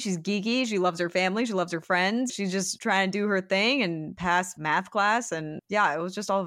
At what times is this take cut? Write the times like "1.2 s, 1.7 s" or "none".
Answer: 2.3 s, 4.4 s, 5.6 s